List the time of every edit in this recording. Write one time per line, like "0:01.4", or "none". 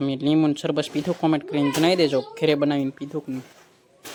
none